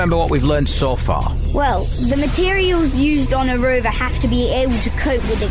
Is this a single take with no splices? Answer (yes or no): yes